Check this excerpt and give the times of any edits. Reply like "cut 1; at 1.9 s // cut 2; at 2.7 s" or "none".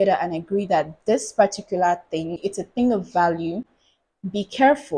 none